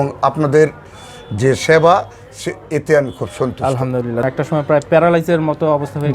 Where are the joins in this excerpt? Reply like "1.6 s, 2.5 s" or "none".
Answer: 4.2 s

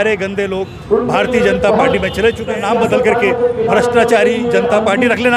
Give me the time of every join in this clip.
2.5 s

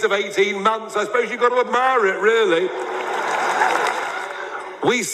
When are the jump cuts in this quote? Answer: 4.2 s

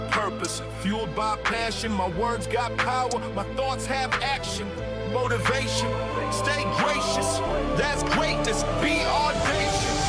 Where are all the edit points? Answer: none

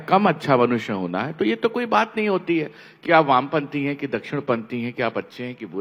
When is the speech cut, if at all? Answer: none

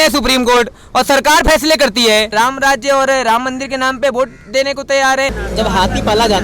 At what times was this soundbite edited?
2.3 s, 5.4 s

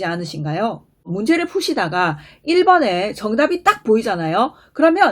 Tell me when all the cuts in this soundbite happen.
1.1 s

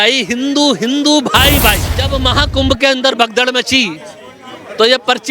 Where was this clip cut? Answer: 2.0 s

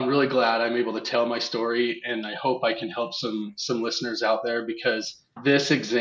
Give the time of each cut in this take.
none

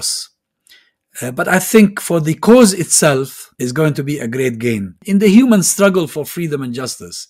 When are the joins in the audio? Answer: 3.4 s, 5.0 s

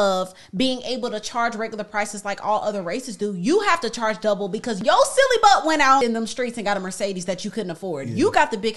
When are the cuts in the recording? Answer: 4.7 s, 6.0 s

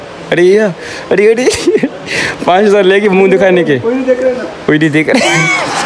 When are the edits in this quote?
none

